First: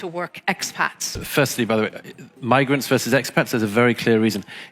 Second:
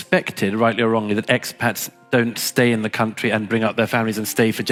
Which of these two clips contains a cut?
first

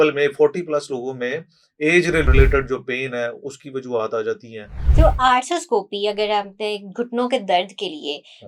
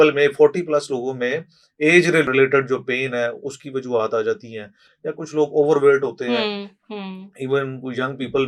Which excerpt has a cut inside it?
first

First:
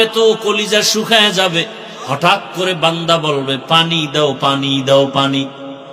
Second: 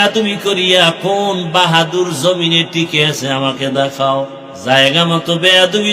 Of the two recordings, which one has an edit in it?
second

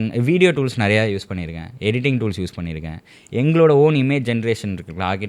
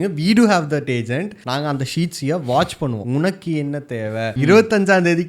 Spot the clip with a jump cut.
second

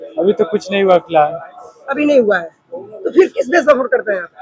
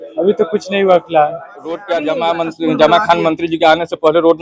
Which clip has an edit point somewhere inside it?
second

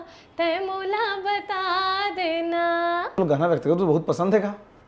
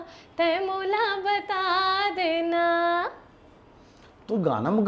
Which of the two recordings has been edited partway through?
first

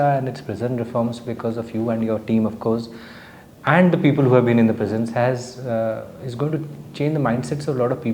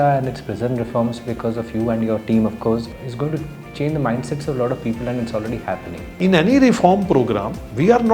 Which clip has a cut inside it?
second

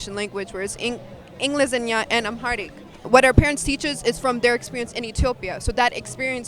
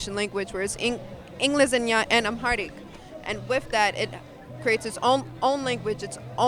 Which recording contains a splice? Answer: first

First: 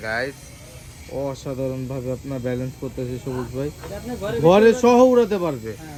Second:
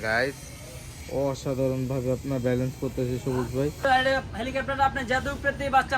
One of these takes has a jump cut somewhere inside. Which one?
second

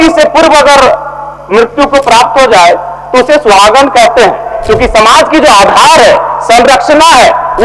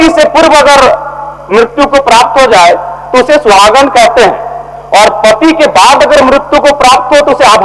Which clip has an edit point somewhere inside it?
first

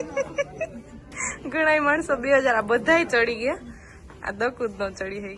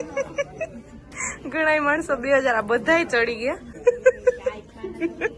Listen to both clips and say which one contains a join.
second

